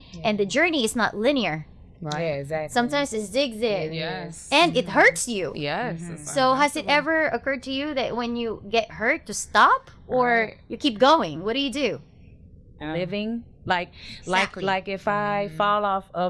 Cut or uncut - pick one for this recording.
cut